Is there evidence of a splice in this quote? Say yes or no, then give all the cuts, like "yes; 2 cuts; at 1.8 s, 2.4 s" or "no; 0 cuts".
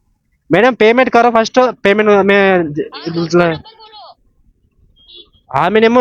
no; 0 cuts